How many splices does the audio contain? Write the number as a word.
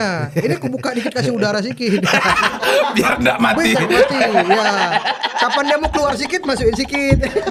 zero